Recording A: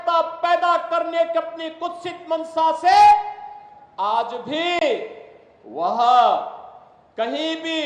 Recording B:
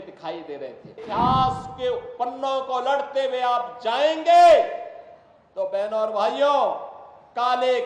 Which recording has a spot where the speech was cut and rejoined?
B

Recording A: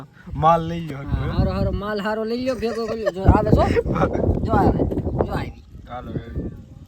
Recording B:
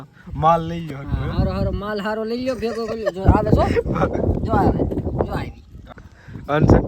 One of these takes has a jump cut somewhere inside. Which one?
B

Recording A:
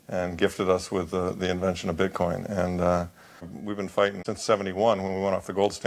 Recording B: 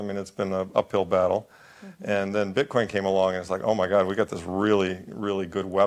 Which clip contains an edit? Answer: A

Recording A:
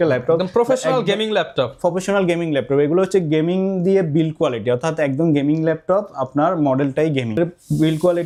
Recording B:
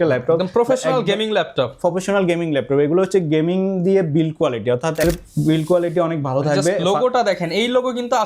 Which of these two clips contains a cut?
B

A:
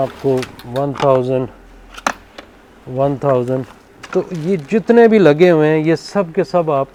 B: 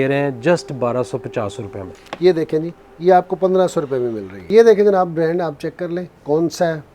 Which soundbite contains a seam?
B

